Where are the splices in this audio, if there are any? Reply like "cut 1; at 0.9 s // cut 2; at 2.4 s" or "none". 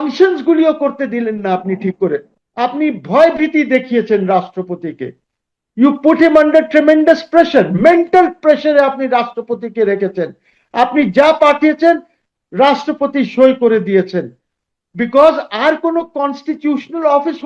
cut 1; at 2.3 s